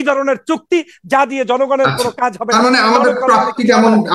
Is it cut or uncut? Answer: uncut